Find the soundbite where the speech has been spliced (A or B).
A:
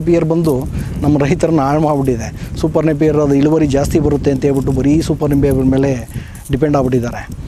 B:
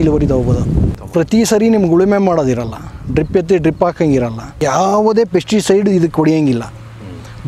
B